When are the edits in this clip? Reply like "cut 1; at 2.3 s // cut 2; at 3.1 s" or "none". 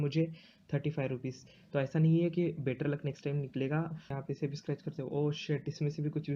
cut 1; at 4.1 s